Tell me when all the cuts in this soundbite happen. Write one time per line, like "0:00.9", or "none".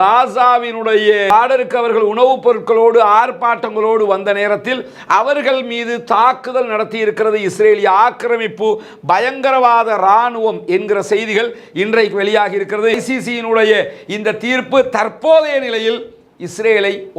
0:13.0